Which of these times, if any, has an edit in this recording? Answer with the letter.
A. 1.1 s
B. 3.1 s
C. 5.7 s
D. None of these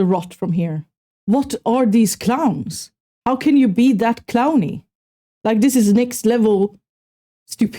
A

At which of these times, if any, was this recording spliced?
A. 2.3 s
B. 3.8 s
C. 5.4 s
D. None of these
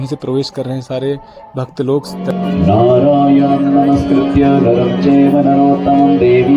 A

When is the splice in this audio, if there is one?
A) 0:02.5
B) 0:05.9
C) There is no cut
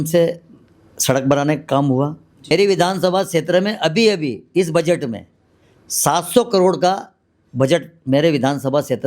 A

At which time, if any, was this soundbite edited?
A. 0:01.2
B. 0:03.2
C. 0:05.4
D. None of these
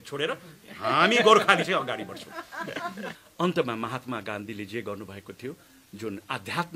B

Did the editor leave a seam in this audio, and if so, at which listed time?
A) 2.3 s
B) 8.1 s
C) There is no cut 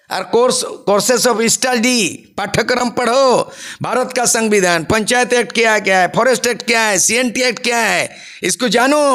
C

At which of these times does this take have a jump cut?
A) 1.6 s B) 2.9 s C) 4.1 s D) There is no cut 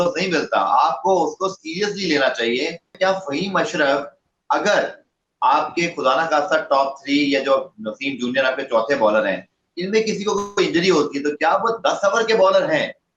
B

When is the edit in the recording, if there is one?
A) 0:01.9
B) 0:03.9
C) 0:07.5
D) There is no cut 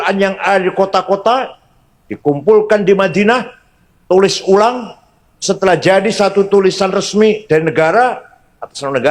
D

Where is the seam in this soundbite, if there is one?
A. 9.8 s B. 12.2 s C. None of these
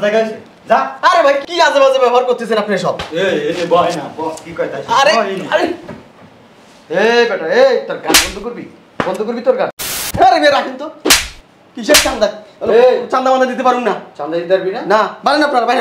A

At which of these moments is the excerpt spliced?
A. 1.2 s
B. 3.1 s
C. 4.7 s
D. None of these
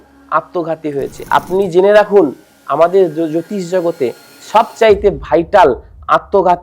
A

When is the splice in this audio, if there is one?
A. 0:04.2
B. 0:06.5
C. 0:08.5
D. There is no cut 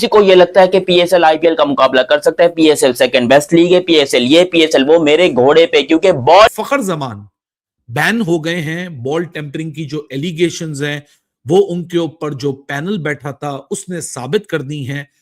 B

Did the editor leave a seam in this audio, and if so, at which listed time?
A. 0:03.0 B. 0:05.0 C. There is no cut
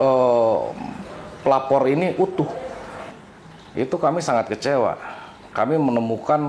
A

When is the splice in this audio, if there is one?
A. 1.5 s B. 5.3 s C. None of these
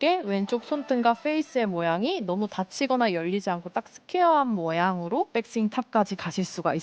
B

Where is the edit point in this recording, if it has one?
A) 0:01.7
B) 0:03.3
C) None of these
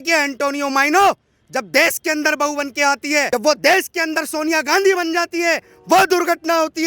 B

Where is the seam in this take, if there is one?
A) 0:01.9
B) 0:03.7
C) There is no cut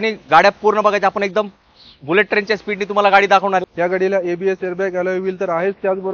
B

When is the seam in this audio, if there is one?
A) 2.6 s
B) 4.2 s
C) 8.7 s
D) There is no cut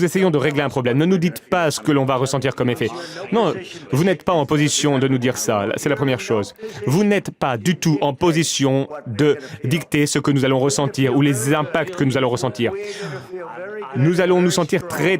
C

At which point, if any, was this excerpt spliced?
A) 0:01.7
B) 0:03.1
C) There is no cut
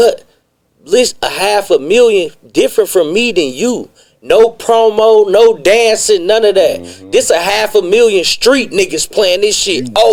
C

